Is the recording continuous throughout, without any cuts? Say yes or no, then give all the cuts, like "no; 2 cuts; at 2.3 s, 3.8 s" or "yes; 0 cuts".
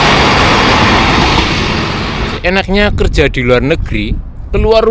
no; 1 cut; at 2.4 s